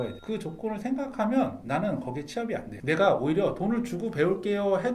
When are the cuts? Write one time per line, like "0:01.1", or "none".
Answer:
none

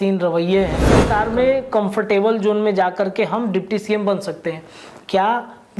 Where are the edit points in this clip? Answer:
0:00.9

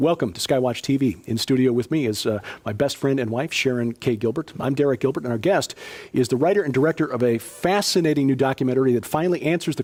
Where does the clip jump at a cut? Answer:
none

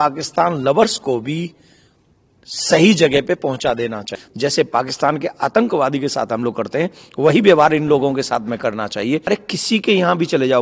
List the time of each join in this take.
0:04.2
0:09.2

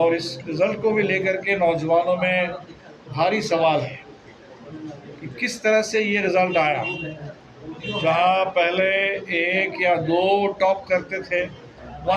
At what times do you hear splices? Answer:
none

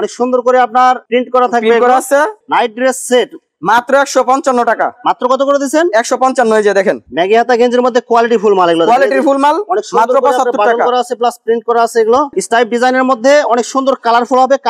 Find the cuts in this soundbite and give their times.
0:02.4
0:07.1
0:12.3

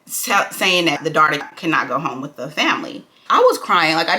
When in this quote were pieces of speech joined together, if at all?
0:01.4
0:03.1

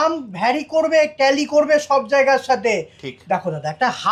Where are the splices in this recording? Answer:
none

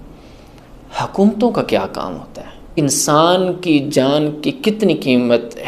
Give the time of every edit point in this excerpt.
0:02.7

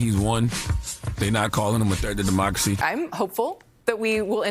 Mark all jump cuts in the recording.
0:02.8

